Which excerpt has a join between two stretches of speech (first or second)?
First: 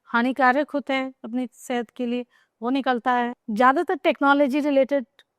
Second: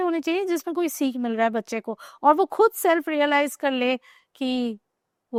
first